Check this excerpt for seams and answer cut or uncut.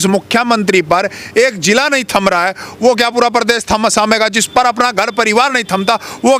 uncut